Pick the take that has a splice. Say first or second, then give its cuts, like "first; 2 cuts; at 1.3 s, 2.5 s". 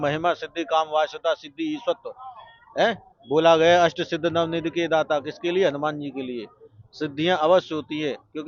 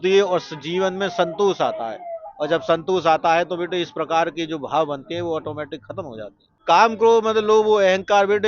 second; 1 cut; at 6.5 s